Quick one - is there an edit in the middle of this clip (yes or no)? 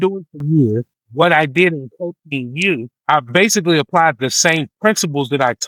no